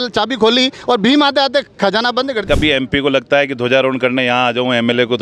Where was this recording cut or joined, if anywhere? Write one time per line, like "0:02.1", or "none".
0:02.4